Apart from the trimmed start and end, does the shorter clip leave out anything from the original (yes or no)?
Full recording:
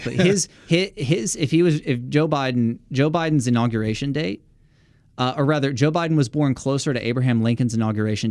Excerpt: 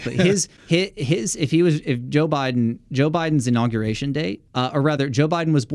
yes